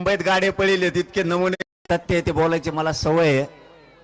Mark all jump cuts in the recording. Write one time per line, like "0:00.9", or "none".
0:01.5